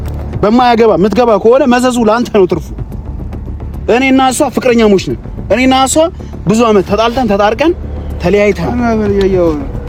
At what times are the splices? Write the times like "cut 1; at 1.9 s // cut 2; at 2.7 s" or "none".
none